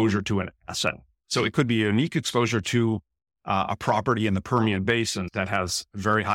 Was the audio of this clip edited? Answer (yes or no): yes